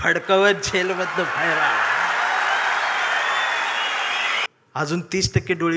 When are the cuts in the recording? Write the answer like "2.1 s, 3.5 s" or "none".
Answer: 4.5 s